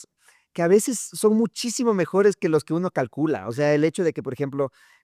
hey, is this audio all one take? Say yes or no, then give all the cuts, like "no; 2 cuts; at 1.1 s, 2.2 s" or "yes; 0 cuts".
yes; 0 cuts